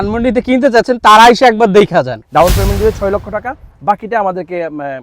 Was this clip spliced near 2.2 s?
yes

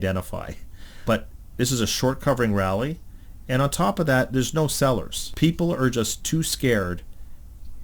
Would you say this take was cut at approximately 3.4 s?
no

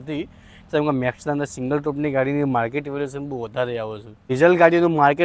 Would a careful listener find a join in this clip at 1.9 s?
no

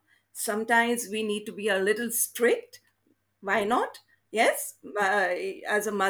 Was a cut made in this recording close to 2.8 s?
no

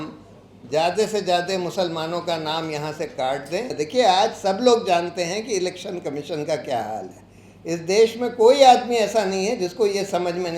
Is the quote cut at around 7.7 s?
no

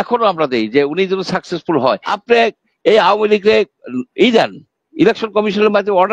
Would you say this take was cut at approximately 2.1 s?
yes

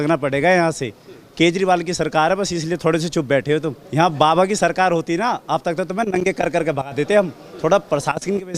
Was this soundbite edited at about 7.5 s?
no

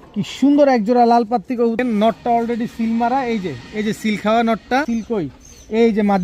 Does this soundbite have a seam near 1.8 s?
yes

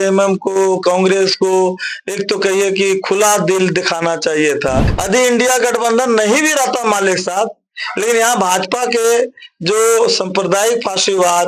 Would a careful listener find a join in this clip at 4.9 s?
yes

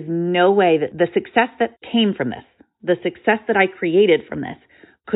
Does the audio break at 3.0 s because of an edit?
no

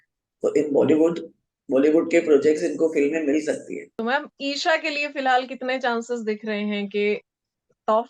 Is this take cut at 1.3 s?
no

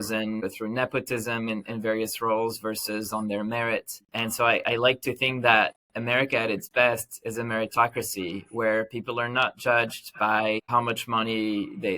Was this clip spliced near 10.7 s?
yes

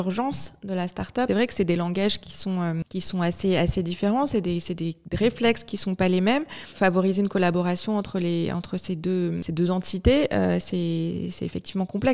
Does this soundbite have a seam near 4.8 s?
no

